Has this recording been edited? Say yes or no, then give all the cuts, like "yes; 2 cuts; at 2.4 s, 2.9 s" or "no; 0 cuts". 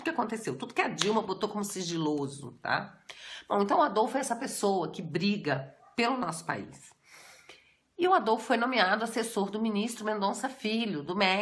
yes; 1 cut; at 7.3 s